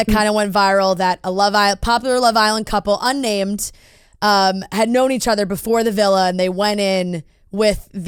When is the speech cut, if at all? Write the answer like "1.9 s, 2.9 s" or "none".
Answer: none